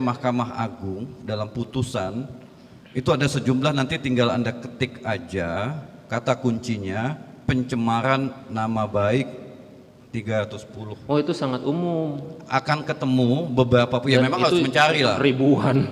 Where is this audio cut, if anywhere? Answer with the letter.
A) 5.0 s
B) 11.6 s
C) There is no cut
C